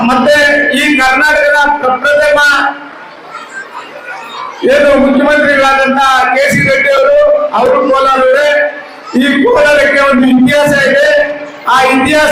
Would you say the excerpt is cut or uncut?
uncut